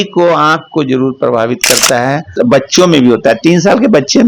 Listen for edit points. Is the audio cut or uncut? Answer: cut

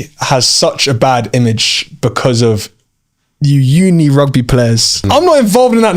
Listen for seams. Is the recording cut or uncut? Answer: cut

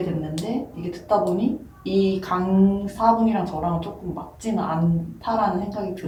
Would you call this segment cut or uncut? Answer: uncut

